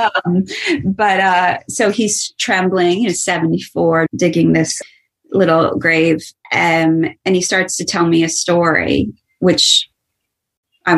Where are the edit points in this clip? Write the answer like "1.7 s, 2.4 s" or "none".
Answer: 4.1 s